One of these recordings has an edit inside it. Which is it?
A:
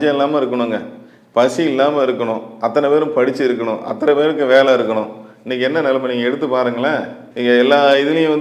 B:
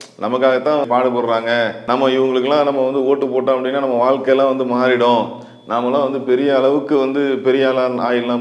B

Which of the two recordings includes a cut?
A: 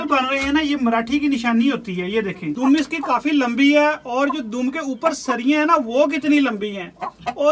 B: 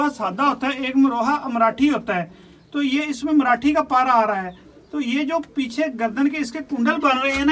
A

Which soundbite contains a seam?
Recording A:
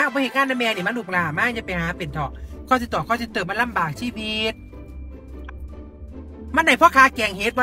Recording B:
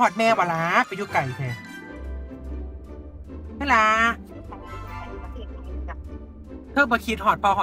B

